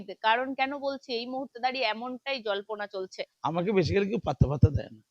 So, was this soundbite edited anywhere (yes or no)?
yes